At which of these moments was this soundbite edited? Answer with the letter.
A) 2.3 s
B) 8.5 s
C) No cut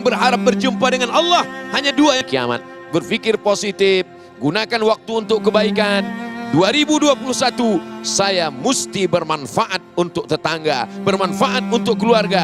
A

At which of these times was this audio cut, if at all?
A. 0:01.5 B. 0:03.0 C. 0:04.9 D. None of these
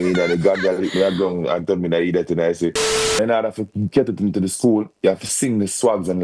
B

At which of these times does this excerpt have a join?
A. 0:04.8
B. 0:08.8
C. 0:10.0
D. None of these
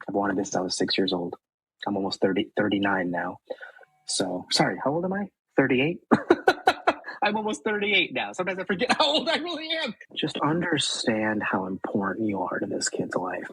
C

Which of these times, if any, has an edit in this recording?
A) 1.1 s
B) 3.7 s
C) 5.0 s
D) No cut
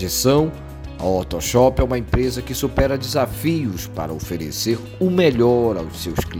D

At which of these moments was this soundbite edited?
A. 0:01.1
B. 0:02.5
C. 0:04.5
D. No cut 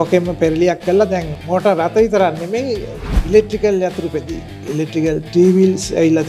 C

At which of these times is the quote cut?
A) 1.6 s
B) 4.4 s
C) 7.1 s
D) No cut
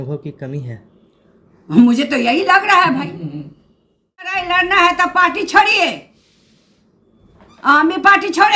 B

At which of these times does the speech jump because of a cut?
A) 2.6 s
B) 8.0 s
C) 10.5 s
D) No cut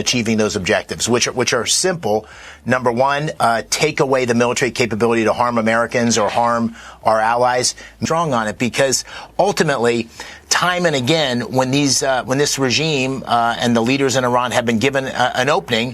B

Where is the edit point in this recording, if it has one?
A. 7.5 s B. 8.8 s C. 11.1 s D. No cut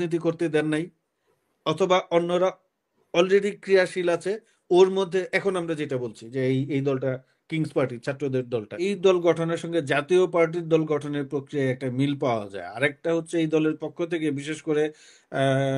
B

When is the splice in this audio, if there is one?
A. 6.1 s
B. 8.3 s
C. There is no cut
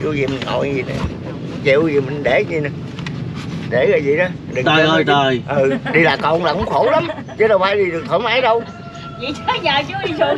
C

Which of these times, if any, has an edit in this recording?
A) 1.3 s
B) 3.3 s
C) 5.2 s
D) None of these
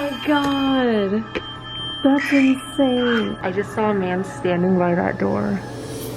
B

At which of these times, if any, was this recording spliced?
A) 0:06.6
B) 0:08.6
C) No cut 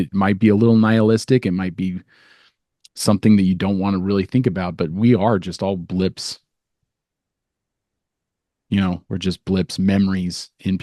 C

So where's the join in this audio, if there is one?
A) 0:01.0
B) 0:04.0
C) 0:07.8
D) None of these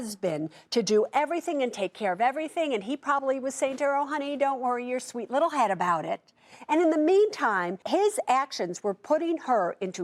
C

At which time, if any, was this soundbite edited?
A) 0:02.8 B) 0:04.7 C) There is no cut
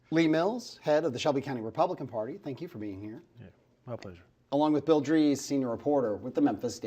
B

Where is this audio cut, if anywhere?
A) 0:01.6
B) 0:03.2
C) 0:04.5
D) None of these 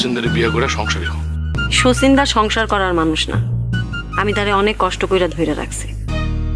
A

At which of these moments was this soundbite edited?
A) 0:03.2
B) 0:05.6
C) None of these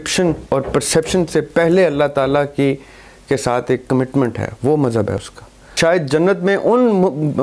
B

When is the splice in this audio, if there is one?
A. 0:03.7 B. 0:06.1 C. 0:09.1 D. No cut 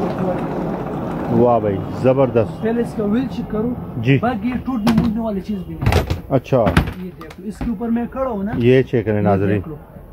D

